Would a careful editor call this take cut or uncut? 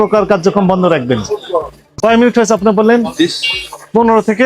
cut